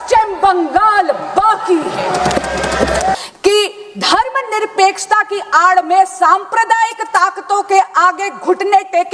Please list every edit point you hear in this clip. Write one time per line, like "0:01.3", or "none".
0:03.1